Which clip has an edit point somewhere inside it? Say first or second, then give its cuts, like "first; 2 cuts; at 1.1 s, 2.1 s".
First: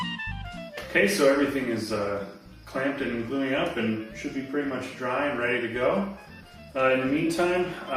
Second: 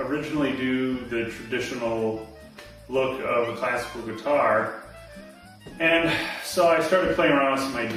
first; 1 cut; at 2.6 s